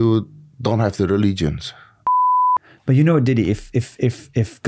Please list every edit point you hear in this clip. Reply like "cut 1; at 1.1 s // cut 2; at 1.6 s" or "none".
cut 1; at 2.2 s